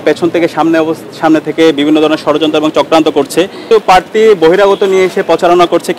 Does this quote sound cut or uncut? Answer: cut